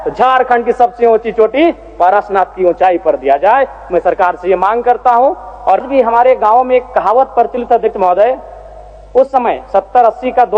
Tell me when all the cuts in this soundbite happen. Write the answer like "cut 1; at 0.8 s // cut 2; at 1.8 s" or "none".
cut 1; at 5.8 s